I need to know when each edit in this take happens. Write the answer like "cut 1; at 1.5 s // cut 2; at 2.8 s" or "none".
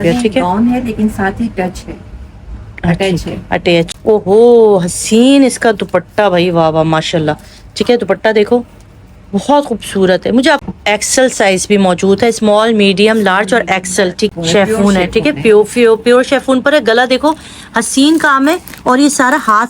cut 1; at 3.9 s // cut 2; at 10.6 s // cut 3; at 14.3 s